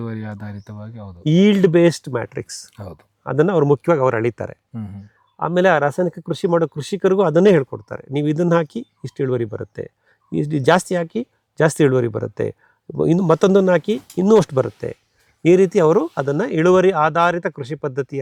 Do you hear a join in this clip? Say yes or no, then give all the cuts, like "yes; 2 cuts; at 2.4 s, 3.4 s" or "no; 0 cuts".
no; 0 cuts